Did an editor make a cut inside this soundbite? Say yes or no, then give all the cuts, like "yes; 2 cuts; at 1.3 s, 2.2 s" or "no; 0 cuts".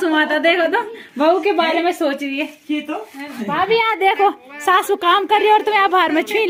no; 0 cuts